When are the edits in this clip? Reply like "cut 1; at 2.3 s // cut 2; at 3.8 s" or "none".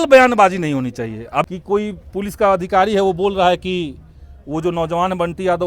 cut 1; at 1.4 s

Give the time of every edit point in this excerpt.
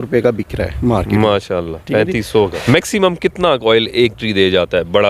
cut 1; at 2.5 s

